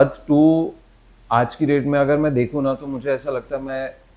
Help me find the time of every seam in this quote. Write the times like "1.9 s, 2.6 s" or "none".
none